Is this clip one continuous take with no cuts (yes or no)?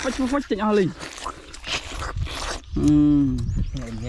yes